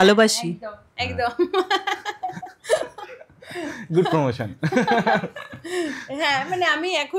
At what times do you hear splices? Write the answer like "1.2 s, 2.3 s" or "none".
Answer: none